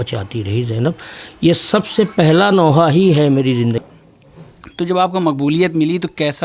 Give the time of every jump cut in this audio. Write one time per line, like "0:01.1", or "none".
0:03.8